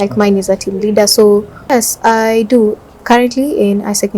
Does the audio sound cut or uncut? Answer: cut